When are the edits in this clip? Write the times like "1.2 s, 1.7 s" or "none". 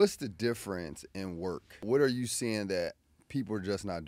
1.8 s